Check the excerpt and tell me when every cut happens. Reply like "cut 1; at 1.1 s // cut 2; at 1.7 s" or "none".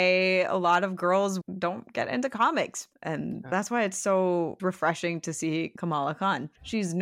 cut 1; at 1.4 s // cut 2; at 2.9 s // cut 3; at 4.6 s // cut 4; at 6.0 s